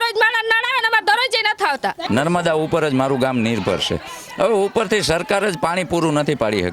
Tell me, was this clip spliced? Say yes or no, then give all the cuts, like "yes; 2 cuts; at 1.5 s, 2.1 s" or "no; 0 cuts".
yes; 1 cut; at 2.0 s